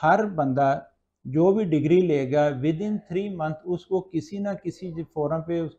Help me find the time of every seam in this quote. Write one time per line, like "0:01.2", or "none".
none